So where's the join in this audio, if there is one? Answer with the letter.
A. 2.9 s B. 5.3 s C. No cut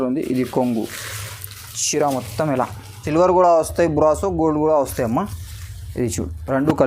A